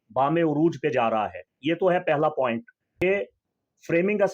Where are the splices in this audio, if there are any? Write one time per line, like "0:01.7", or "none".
0:03.0